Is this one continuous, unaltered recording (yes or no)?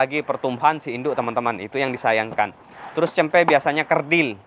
yes